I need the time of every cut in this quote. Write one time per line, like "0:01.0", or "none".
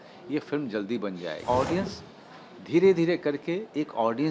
0:01.4